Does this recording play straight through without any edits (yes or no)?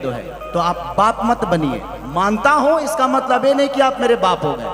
yes